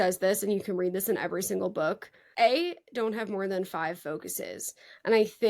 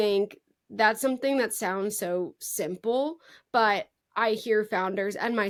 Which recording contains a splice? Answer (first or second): first